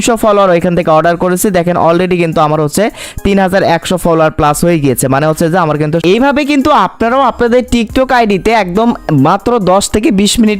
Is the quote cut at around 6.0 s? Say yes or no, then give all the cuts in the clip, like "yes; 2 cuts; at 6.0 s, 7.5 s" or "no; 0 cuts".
yes; 1 cut; at 6.0 s